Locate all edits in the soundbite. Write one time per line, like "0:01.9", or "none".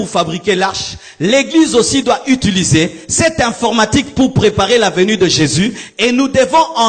none